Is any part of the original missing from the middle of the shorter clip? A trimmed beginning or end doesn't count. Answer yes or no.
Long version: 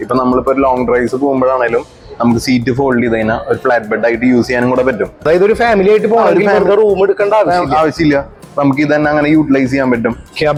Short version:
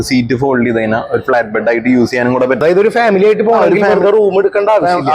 yes